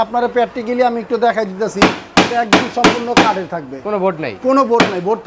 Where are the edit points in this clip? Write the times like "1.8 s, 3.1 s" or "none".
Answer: none